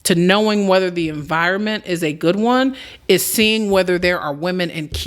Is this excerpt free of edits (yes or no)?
yes